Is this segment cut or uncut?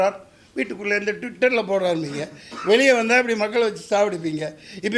uncut